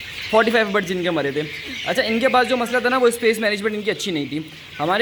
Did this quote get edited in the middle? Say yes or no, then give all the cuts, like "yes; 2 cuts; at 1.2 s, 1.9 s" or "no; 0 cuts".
no; 0 cuts